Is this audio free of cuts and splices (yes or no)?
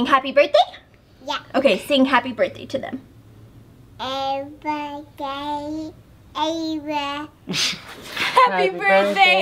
yes